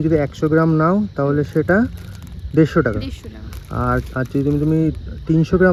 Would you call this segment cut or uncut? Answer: uncut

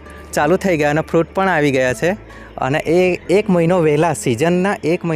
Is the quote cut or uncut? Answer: uncut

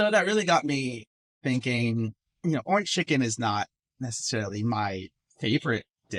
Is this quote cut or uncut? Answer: cut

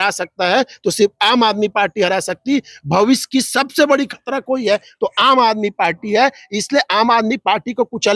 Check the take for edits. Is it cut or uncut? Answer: uncut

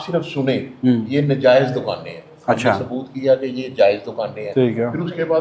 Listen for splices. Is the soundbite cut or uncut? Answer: uncut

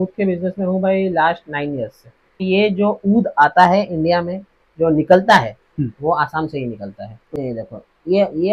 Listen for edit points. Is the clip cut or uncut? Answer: cut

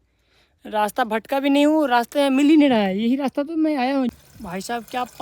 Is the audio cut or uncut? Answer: cut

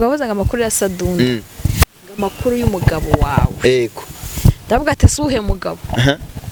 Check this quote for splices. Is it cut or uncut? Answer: uncut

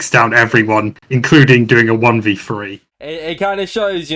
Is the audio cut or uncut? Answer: cut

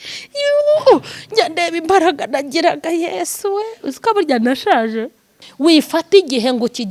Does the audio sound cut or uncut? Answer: cut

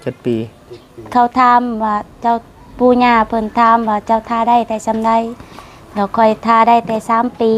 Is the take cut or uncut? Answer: uncut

